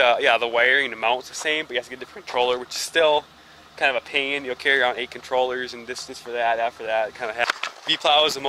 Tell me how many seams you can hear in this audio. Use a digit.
1